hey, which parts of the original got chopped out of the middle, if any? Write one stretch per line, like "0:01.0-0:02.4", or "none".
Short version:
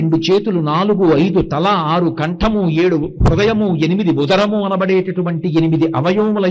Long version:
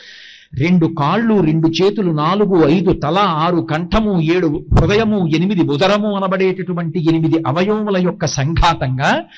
none